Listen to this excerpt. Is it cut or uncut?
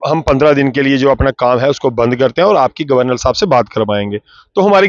uncut